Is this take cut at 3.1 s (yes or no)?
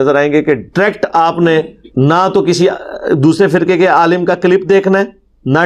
no